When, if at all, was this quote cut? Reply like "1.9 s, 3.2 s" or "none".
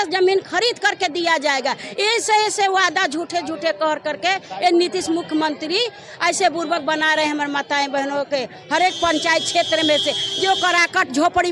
none